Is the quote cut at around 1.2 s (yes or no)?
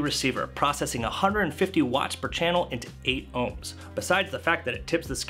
no